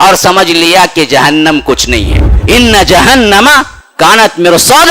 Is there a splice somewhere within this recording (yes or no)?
yes